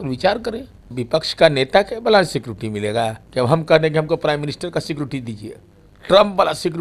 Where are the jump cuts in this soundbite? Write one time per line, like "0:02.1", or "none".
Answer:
0:00.9
0:03.2